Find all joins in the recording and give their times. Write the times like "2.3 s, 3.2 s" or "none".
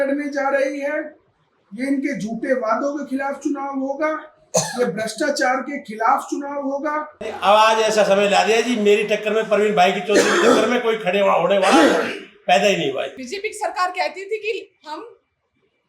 7.3 s, 13.2 s